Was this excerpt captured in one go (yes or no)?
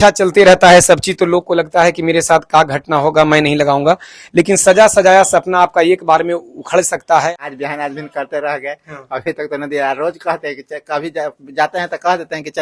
no